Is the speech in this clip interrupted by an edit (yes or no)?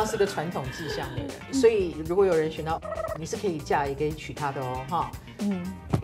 yes